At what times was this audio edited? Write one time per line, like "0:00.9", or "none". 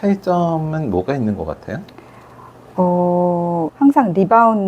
0:03.7